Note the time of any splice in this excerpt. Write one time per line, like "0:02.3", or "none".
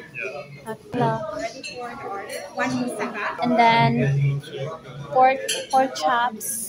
0:00.9
0:03.4